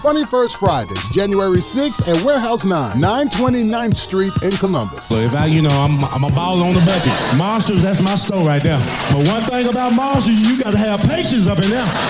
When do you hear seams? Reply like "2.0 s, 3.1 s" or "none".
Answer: none